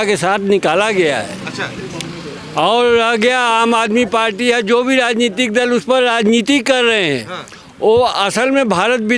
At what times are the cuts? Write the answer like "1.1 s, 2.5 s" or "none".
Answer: none